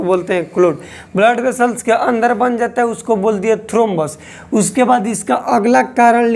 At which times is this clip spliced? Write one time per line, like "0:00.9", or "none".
none